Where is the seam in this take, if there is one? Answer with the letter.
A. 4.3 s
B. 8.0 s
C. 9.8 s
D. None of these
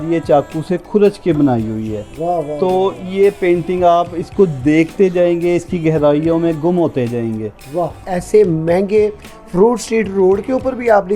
B